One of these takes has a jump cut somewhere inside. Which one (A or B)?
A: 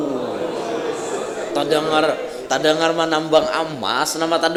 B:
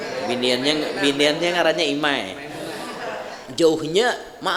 B